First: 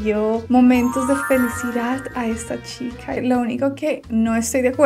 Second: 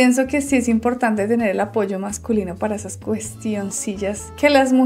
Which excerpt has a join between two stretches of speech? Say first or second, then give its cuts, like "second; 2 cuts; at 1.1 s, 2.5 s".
first; 1 cut; at 3.2 s